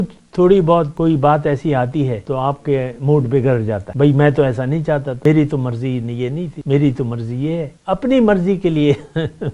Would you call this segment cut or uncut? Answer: cut